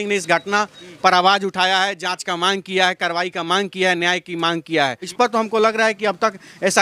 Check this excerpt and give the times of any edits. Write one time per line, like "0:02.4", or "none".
0:05.1